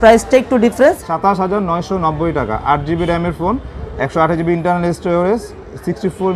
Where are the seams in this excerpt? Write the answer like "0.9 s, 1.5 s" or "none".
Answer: 1.1 s